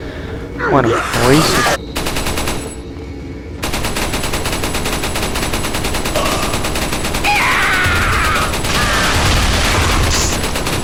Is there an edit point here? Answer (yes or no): no